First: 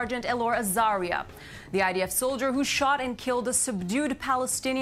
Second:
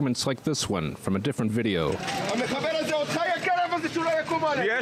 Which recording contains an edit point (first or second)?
second